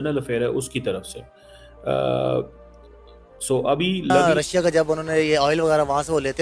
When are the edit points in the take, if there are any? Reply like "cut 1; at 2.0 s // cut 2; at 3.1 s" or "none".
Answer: cut 1; at 4.3 s